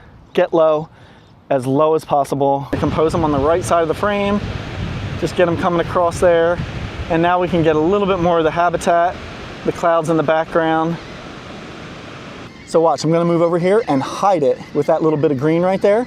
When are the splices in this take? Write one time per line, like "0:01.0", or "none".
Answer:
0:02.8
0:12.4